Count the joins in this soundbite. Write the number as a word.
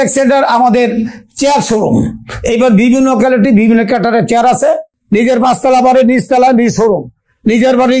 one